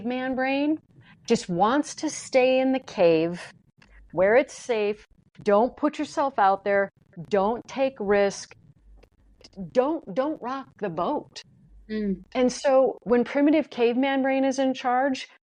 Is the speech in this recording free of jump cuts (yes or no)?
yes